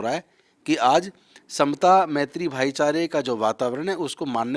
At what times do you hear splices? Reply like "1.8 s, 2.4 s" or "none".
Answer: none